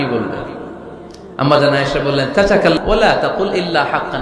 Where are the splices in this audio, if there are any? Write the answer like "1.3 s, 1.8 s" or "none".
2.8 s

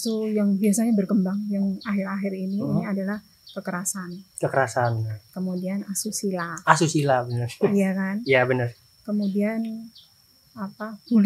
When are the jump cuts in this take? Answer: none

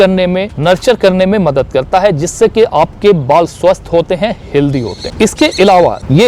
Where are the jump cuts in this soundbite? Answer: none

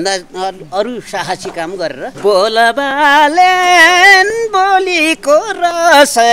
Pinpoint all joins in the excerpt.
2.1 s

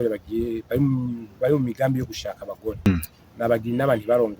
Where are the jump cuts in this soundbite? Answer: 2.9 s

